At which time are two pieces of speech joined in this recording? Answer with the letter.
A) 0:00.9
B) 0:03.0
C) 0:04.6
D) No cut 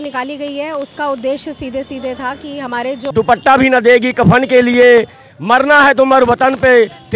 B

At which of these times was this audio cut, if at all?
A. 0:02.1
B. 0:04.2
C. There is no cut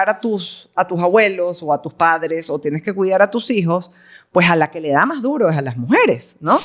C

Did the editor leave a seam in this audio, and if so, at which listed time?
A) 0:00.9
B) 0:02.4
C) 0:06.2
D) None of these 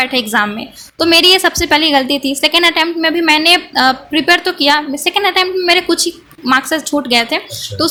D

